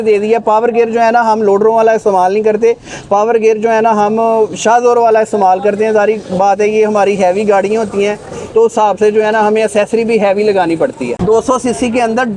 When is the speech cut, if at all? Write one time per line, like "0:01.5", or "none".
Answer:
0:11.2